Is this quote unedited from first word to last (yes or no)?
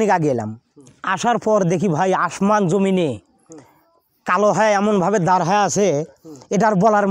yes